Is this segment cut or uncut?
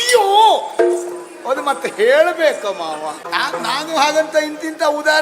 cut